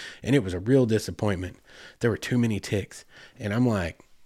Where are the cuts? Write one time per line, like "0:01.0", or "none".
none